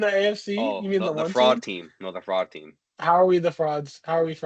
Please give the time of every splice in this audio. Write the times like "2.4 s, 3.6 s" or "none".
none